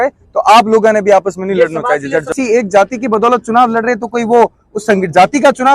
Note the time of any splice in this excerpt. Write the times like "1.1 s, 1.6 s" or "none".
2.3 s